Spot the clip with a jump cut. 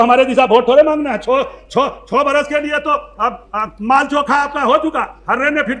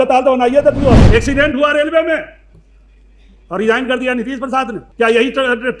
second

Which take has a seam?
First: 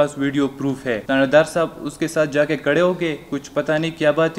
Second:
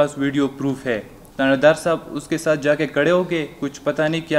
first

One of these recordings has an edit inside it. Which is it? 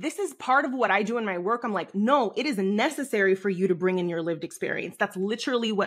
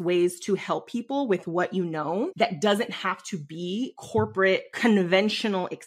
second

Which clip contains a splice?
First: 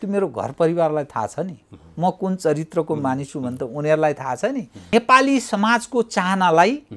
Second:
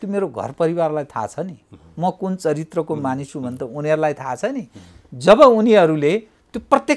first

